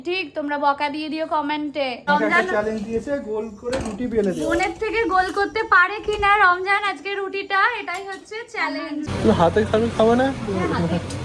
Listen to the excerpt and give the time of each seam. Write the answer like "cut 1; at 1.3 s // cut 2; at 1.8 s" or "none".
cut 1; at 2.1 s // cut 2; at 9.1 s